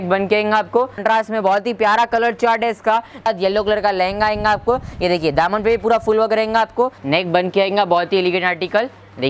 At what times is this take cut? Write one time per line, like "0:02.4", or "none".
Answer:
0:01.0
0:03.3
0:07.0